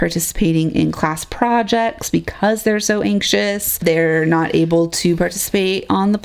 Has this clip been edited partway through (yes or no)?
yes